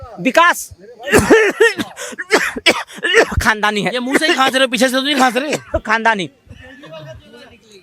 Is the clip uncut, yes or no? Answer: yes